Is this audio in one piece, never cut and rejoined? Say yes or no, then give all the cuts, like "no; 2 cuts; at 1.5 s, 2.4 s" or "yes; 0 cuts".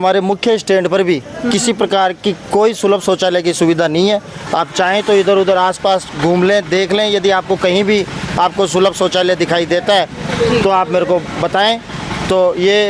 yes; 0 cuts